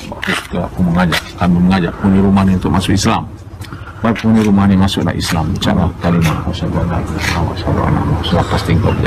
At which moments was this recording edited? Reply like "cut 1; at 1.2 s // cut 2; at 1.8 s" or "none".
none